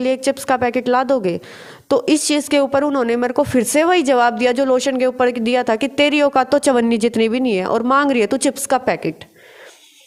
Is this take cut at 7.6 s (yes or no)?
no